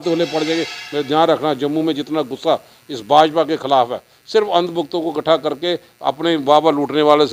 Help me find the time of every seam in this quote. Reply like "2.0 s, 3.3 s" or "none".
none